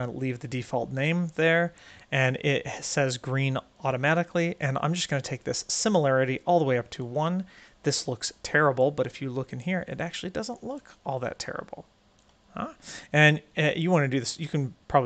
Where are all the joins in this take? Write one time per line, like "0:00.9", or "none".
none

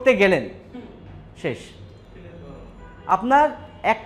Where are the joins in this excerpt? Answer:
none

